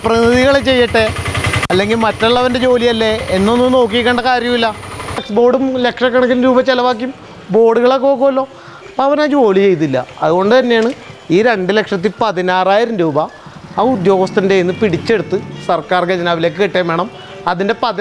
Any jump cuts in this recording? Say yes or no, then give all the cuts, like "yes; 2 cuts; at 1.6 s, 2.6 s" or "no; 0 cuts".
yes; 1 cut; at 5.3 s